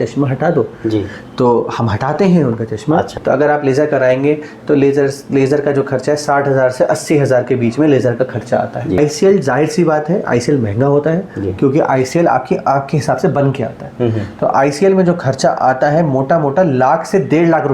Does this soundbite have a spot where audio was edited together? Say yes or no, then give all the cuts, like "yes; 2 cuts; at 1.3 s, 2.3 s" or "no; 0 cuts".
yes; 2 cuts; at 3.1 s, 9.0 s